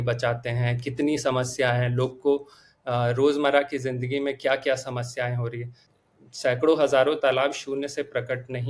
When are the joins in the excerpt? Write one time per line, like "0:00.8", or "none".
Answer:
0:05.9